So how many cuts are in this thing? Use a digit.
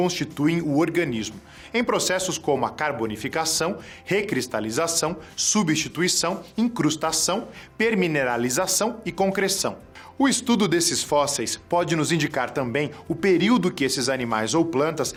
0